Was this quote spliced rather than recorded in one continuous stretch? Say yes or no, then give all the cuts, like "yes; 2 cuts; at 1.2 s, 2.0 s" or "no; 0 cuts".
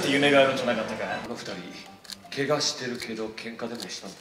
yes; 1 cut; at 1.3 s